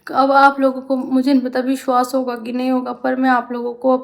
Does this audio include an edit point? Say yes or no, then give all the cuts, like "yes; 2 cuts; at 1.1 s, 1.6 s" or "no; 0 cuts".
no; 0 cuts